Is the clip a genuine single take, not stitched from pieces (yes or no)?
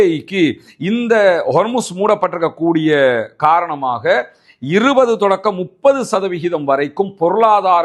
yes